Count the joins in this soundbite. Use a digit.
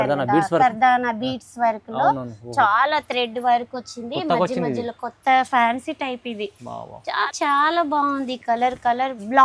1